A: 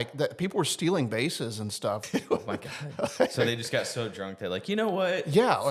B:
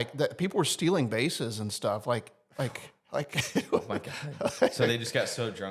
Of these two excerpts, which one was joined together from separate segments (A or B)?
A